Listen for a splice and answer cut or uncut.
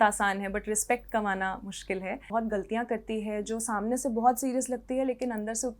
cut